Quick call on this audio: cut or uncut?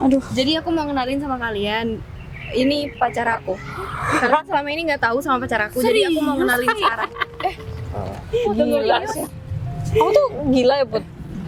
uncut